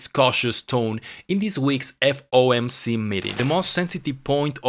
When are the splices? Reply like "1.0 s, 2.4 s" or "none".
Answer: 3.3 s